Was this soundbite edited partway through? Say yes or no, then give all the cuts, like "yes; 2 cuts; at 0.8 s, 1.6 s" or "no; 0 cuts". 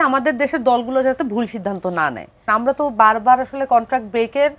yes; 1 cut; at 2.5 s